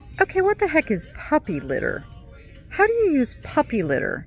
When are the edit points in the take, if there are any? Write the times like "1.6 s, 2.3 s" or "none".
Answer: none